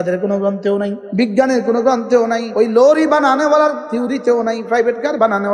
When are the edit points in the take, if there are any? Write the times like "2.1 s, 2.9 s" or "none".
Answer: 1.0 s, 2.5 s, 3.8 s